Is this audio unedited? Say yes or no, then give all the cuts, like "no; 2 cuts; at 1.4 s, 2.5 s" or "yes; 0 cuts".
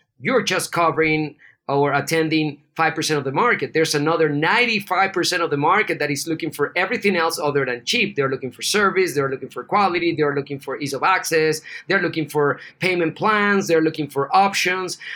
no; 1 cut; at 12.7 s